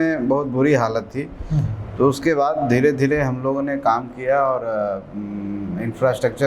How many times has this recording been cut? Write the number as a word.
zero